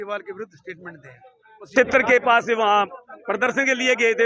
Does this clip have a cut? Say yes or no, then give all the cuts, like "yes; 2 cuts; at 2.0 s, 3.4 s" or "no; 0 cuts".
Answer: yes; 1 cut; at 1.7 s